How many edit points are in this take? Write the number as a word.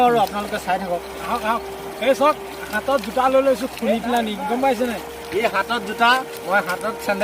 zero